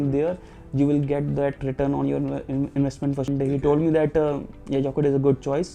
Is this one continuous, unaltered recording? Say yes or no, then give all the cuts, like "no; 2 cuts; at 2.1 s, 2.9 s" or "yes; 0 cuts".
no; 1 cut; at 3.3 s